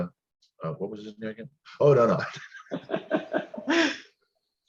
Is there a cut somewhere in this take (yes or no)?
no